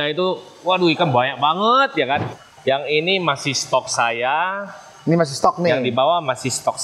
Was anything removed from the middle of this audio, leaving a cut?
yes; 1 cut; at 2.3 s

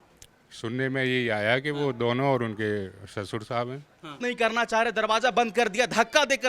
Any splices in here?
yes; 1 cut; at 4.2 s

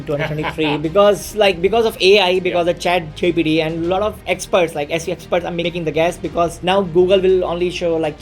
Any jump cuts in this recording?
yes; 3 cuts; at 4.2 s, 5.7 s, 6.6 s

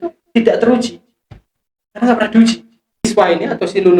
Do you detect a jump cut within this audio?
yes; 1 cut; at 3.1 s

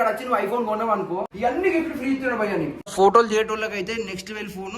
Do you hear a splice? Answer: yes; 2 cuts; at 1.3 s, 2.9 s

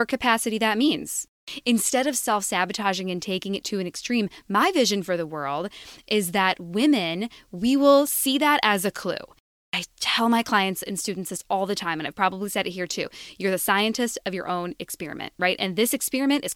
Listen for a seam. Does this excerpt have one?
yes; 2 cuts; at 1.4 s, 9.6 s

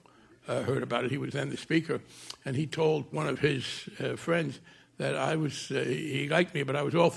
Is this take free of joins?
no; 2 cuts; at 3.1 s, 6.1 s

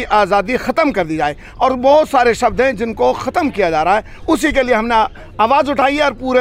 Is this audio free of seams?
yes; 0 cuts

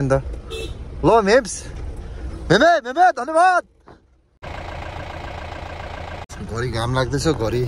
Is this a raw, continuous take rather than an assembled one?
no; 2 cuts; at 4.4 s, 6.3 s

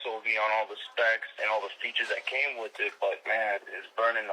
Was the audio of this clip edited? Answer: no; 0 cuts

